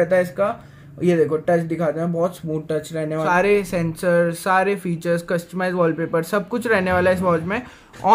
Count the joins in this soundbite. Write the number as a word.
one